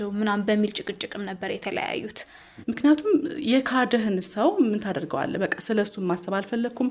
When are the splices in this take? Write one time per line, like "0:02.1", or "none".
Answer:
0:02.5